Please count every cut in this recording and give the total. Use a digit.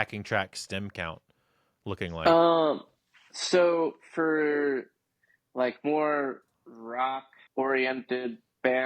1